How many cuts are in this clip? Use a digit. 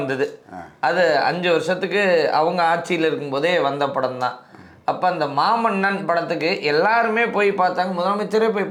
0